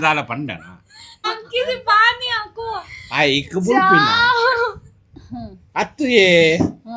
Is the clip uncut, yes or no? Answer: no